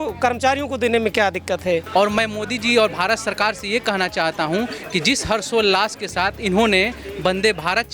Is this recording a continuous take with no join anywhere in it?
no; 1 cut; at 1.9 s

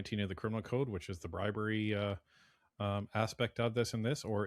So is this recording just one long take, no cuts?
yes; 0 cuts

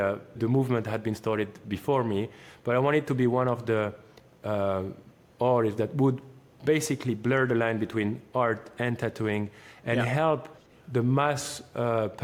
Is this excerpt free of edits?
yes; 0 cuts

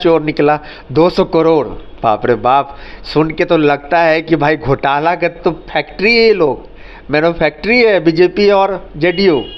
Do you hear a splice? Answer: no; 0 cuts

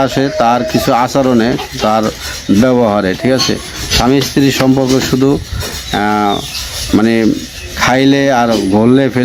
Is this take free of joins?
yes; 0 cuts

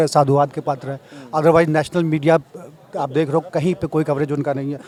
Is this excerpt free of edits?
yes; 0 cuts

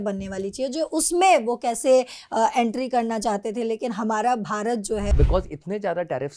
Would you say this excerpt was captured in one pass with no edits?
no; 1 cut; at 5.1 s

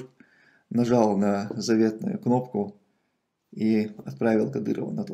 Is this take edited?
no; 0 cuts

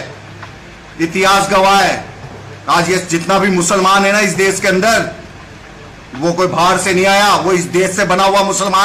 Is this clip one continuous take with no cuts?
yes; 0 cuts

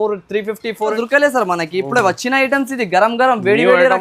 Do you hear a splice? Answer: yes; 1 cut; at 1.0 s

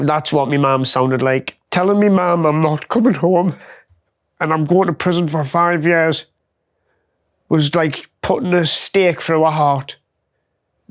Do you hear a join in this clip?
yes; 1 cut; at 1.6 s

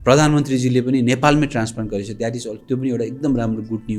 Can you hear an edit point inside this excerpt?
no; 0 cuts

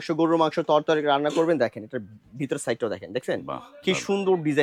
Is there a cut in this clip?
no; 0 cuts

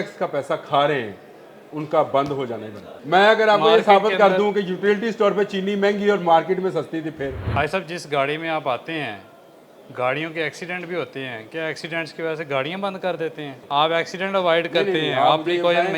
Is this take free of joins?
no; 3 cuts; at 2.9 s, 7.4 s, 13.6 s

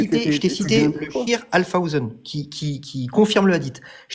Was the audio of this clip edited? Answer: no; 0 cuts

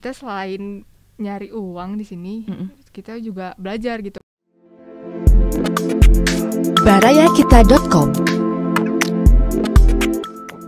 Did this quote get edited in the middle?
yes; 1 cut; at 4.2 s

